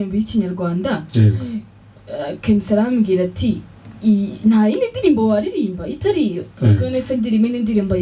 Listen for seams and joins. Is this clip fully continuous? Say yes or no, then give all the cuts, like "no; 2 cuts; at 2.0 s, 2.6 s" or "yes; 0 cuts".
yes; 0 cuts